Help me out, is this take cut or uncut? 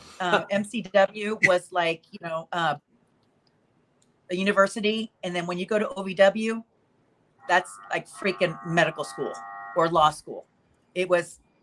uncut